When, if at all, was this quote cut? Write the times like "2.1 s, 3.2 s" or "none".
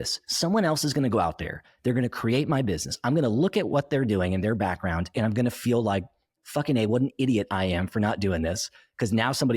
6.4 s